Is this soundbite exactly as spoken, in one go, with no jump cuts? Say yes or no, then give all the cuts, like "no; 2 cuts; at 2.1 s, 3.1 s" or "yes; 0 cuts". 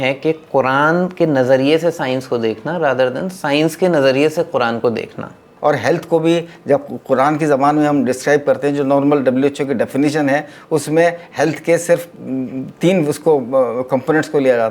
no; 1 cut; at 5.4 s